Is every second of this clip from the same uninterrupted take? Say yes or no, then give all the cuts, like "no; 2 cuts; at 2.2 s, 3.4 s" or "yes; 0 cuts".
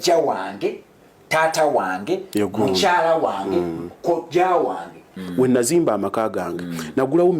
no; 1 cut; at 5.1 s